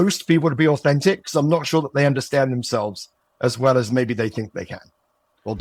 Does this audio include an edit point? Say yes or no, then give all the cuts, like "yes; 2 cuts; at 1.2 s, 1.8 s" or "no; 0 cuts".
no; 0 cuts